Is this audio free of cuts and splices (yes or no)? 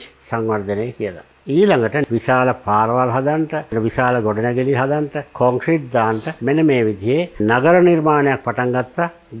no